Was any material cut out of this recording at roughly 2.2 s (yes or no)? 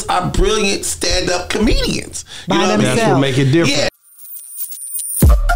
no